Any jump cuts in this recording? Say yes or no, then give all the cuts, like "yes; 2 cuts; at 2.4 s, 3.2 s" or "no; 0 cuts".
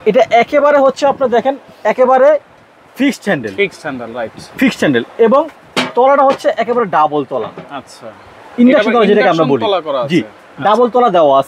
no; 0 cuts